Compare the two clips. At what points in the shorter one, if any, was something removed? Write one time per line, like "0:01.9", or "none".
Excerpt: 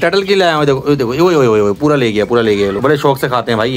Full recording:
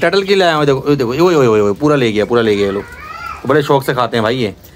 0:02.8